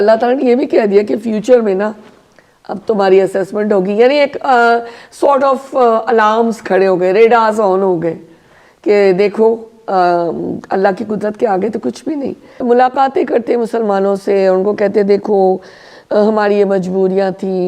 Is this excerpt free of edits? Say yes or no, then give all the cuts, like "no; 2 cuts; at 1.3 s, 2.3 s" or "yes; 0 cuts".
no; 1 cut; at 12.6 s